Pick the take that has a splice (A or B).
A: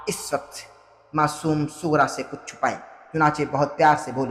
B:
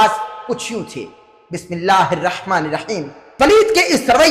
B